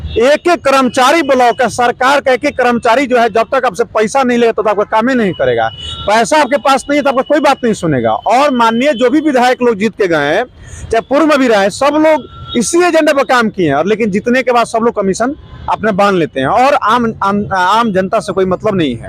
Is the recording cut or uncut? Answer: uncut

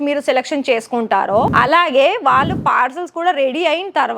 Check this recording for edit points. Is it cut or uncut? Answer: cut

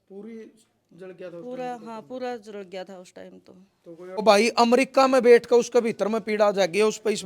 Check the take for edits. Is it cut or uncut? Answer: cut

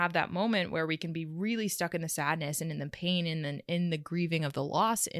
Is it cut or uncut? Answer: uncut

